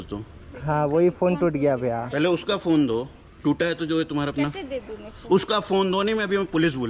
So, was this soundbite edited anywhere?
no; 0 cuts

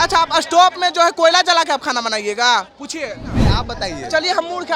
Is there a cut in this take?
yes; 1 cut; at 3.4 s

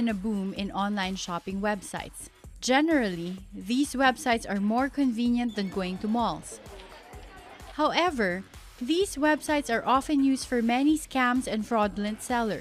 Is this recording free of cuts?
no; 1 cut; at 7.2 s

